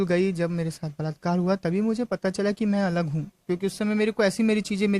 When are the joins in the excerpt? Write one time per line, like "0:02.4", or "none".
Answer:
none